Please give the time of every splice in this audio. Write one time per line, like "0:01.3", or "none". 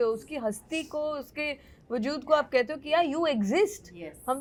none